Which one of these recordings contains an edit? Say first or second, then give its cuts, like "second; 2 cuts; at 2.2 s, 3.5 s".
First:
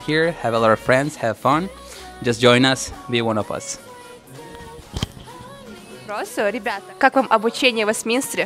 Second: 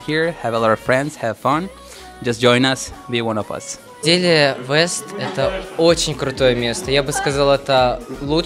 second; 1 cut; at 4.0 s